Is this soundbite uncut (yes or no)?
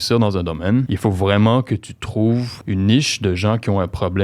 no